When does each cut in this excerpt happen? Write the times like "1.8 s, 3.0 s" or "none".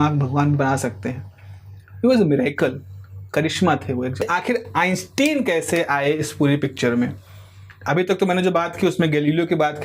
4.2 s